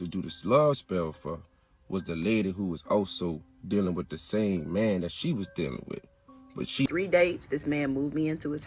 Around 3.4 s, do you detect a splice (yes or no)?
no